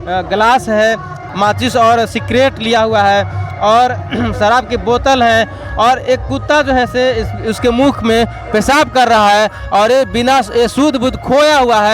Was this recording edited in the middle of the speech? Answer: yes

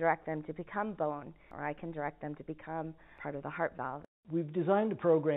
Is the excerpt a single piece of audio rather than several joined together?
no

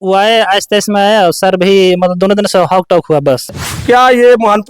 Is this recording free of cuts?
no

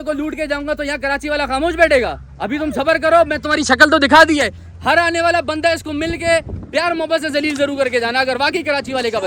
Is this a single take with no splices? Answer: yes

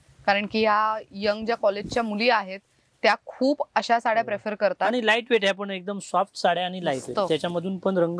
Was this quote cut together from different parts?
no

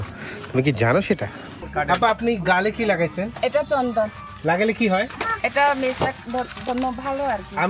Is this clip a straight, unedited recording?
no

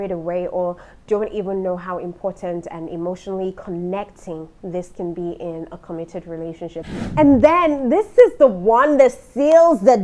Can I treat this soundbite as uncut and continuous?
no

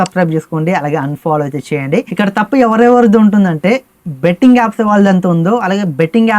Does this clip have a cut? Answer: yes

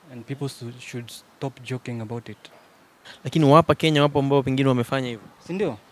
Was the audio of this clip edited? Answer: yes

